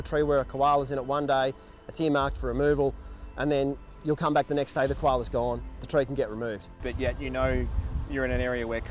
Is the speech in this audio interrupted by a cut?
no; 0 cuts

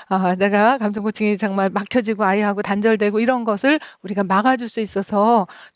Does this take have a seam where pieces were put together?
no; 0 cuts

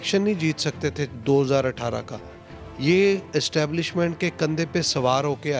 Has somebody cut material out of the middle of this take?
no; 0 cuts

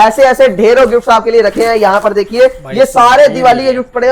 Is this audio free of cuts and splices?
yes; 0 cuts

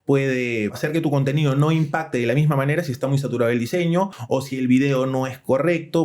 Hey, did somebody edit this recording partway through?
yes; 2 cuts; at 0.8 s, 4.2 s

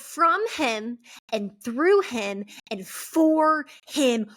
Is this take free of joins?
yes; 0 cuts

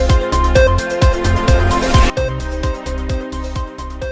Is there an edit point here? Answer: no; 0 cuts

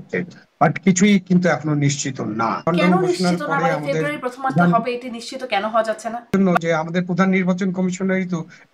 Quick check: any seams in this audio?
yes; 2 cuts; at 2.7 s, 6.3 s

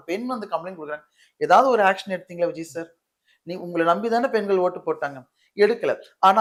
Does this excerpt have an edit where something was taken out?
no; 0 cuts

